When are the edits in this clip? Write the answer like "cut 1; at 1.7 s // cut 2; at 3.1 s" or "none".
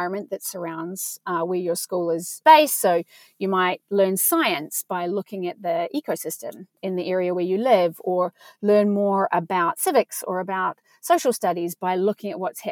cut 1; at 2.4 s // cut 2; at 6.8 s